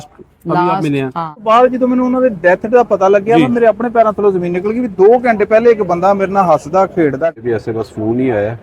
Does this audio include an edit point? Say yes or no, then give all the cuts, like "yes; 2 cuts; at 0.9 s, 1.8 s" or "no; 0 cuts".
yes; 2 cuts; at 1.4 s, 7.3 s